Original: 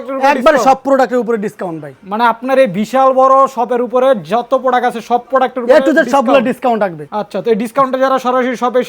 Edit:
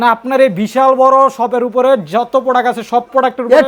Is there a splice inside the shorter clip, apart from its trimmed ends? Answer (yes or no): no